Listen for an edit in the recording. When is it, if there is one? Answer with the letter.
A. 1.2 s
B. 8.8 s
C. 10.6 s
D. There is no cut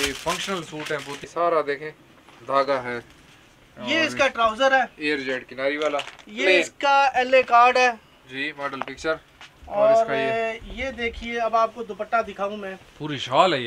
A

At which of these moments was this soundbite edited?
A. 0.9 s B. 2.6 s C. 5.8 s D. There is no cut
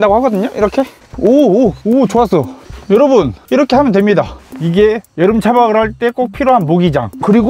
B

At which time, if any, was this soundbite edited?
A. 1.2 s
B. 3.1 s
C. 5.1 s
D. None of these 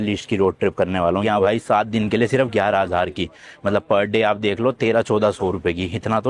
A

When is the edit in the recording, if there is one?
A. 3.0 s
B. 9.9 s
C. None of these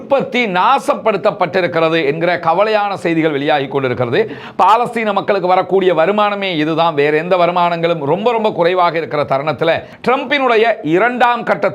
B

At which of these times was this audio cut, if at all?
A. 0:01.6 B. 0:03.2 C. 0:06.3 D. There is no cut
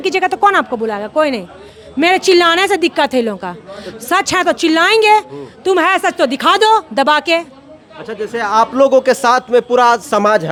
D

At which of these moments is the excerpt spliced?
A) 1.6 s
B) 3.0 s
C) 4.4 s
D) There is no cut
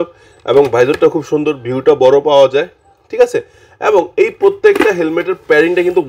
D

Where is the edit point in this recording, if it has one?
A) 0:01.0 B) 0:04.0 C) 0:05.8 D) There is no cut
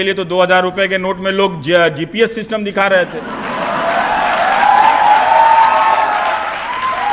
D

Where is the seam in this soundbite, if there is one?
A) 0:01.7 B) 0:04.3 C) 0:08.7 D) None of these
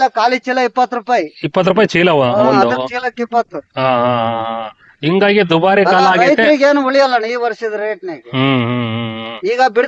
D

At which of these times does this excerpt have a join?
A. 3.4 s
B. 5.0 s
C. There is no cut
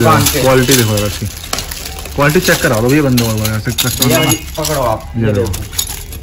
C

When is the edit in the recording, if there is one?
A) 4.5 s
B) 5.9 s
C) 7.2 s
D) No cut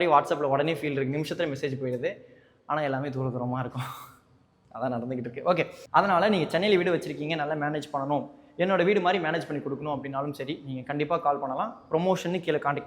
B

